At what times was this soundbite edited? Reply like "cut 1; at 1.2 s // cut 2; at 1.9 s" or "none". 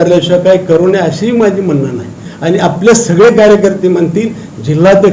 cut 1; at 2.2 s